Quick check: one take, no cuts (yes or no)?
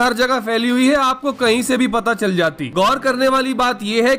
yes